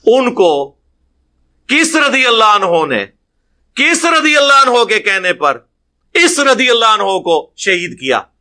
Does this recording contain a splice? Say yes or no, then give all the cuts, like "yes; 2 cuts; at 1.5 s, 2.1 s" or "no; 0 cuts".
no; 0 cuts